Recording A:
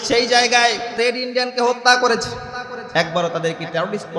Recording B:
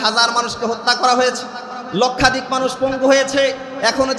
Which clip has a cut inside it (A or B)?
A